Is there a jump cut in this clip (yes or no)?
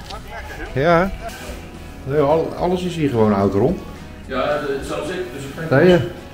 yes